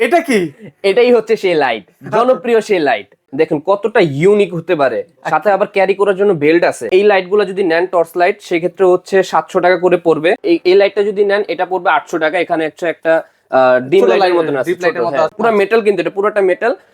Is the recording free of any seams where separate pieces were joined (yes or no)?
no